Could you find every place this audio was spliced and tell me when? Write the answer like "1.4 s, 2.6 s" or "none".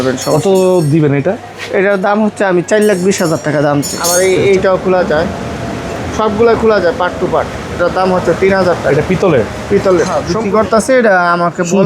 4.0 s, 10.2 s